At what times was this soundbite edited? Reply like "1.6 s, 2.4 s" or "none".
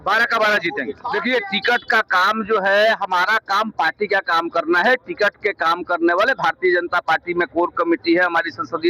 1.0 s